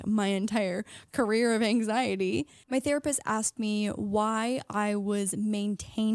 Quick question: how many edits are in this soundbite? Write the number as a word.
one